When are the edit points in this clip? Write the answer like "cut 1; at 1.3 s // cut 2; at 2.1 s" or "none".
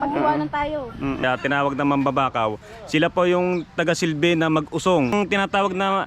cut 1; at 1.2 s // cut 2; at 5.1 s